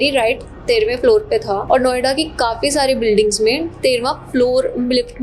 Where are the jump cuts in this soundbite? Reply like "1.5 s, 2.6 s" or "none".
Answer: 1.6 s